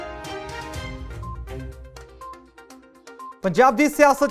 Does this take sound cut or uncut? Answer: cut